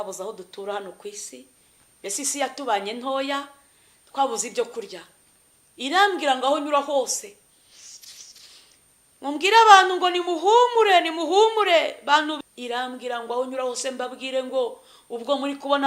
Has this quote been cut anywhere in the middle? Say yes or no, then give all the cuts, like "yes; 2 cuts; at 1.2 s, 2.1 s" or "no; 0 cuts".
yes; 1 cut; at 12.4 s